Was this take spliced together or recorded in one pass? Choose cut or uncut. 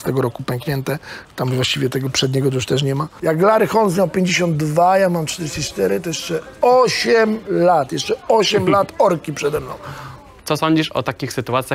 cut